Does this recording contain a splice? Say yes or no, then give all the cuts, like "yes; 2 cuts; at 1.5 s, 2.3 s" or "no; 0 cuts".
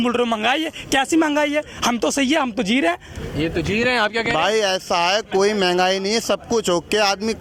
no; 0 cuts